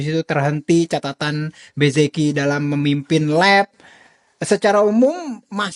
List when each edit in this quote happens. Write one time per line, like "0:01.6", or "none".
none